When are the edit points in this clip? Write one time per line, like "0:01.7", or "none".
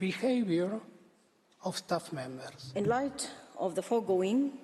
0:02.6